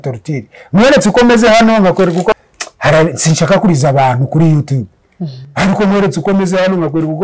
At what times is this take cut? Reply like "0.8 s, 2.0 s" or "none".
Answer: none

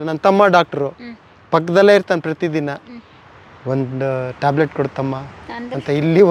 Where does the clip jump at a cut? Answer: none

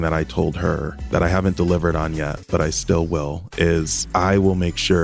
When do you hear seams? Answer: 0.9 s, 4.0 s

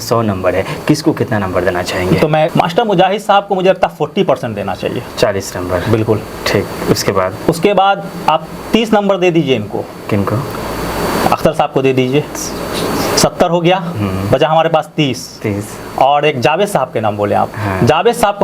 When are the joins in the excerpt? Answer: 2.5 s

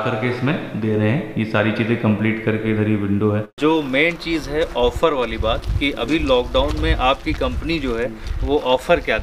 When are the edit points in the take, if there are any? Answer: 3.5 s

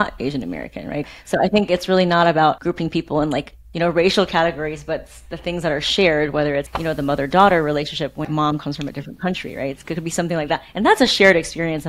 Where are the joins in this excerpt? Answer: 1.1 s, 2.6 s, 6.7 s, 8.2 s

